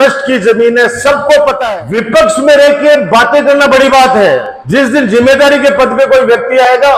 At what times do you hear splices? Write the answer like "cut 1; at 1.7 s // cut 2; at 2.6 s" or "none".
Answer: cut 1; at 1.6 s // cut 2; at 4.6 s